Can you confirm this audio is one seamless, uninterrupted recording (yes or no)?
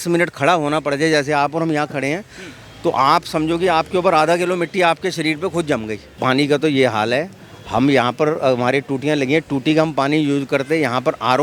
no